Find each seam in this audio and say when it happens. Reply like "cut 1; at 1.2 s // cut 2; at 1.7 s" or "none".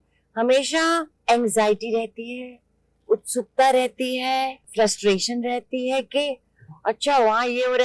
cut 1; at 1.1 s // cut 2; at 4.7 s